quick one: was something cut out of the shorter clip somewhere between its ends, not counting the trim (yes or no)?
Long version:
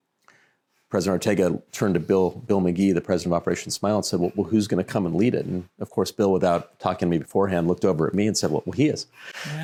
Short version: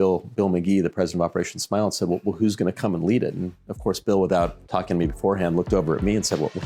no